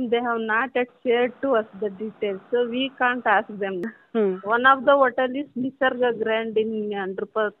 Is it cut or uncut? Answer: cut